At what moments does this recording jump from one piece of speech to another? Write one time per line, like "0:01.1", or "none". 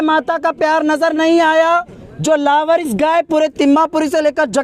0:02.0